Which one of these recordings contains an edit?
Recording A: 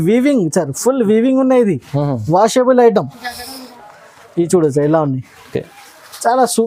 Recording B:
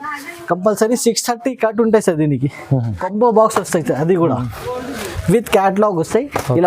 B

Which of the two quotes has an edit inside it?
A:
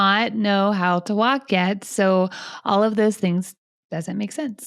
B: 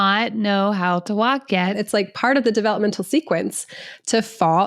B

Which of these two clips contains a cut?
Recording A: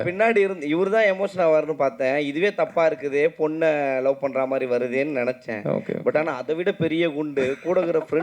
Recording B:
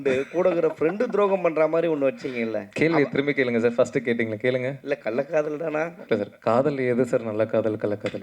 B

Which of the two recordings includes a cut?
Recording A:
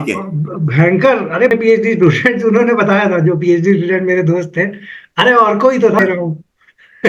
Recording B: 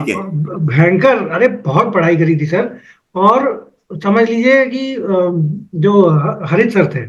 A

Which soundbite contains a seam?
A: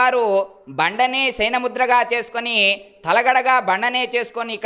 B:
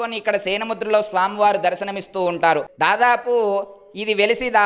B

